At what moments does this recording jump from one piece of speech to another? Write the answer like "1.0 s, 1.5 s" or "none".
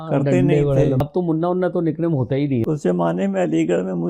1.0 s, 2.6 s

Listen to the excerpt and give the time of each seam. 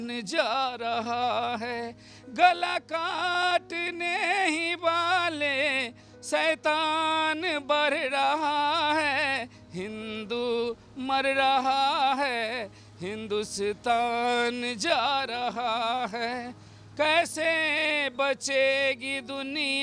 none

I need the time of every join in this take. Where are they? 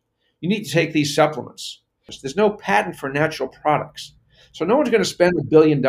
2.1 s

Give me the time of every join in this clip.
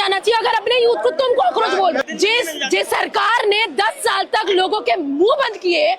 2.0 s

